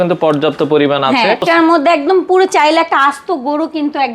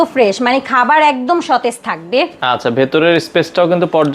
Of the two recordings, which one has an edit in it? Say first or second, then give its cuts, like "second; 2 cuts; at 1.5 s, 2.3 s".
first; 1 cut; at 1.4 s